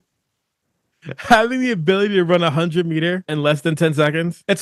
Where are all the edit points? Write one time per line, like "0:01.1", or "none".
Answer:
none